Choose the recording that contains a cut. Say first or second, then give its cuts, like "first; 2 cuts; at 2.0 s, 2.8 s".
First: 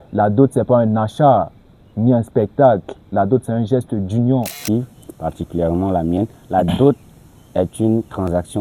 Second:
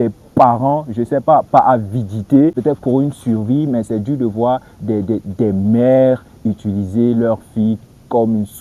first; 1 cut; at 4.6 s